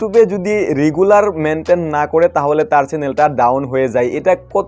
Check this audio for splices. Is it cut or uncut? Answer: uncut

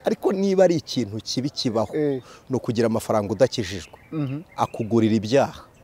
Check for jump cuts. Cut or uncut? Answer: uncut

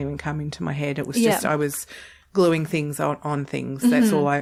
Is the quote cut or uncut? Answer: uncut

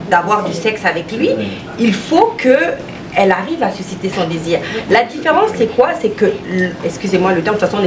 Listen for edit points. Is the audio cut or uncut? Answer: uncut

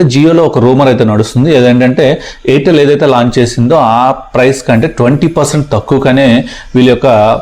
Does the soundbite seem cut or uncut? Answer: uncut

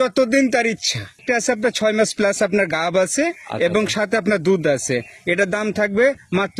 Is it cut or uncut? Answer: cut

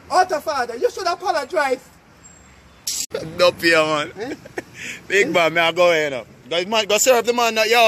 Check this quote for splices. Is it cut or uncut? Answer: cut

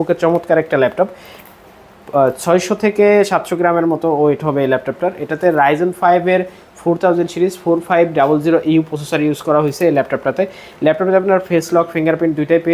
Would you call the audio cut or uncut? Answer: uncut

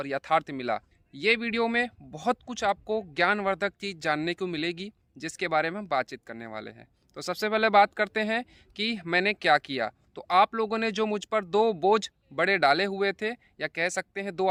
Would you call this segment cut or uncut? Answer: uncut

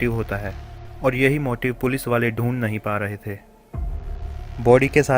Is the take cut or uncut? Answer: uncut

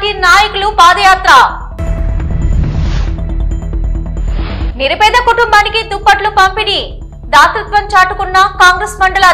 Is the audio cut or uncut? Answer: uncut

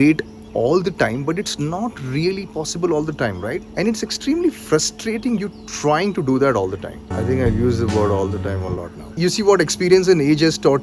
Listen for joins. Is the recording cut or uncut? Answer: uncut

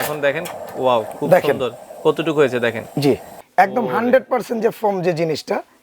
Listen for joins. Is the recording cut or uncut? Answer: cut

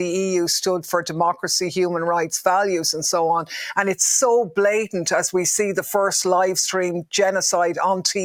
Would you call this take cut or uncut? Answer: uncut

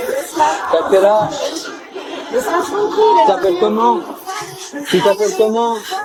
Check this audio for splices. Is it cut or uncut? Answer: uncut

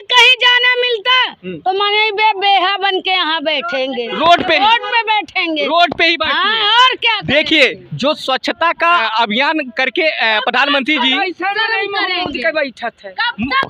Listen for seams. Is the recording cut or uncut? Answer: uncut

